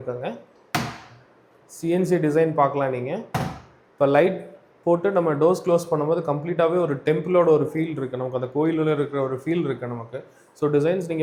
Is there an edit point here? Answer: no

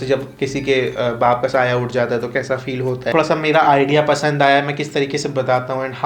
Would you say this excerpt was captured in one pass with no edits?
no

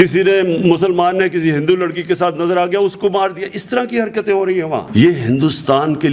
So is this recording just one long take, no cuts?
yes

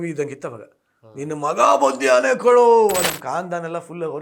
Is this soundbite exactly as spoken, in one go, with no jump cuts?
no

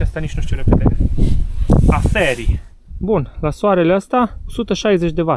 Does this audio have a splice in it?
yes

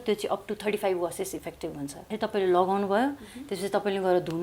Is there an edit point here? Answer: yes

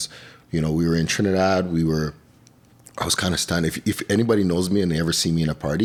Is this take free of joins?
yes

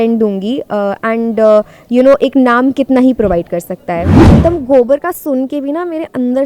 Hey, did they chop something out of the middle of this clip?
yes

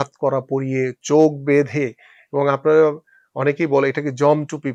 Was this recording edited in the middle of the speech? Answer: no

